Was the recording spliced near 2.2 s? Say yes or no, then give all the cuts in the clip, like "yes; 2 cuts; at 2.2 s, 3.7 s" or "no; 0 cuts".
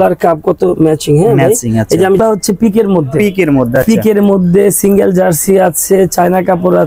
yes; 1 cut; at 2.2 s